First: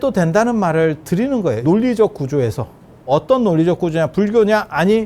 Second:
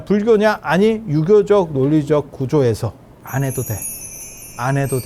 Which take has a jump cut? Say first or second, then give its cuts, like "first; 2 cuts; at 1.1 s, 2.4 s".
first; 2 cuts; at 1.6 s, 3.1 s